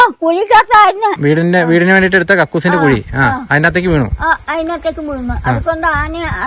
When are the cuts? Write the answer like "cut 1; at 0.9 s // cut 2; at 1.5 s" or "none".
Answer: cut 1; at 1.2 s